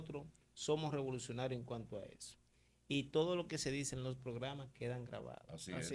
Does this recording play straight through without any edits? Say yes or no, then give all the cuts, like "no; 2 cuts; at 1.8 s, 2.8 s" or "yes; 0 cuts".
yes; 0 cuts